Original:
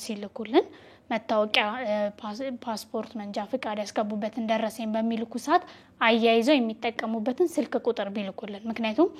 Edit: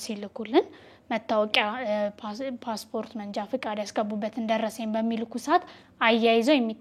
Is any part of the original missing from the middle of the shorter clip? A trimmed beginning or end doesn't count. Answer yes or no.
no